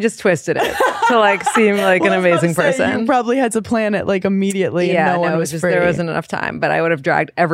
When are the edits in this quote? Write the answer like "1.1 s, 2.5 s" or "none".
none